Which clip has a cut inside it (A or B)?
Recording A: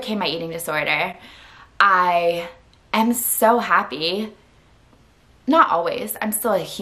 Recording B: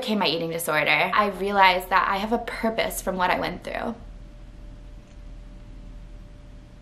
B